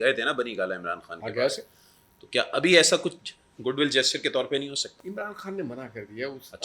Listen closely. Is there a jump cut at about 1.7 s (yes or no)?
no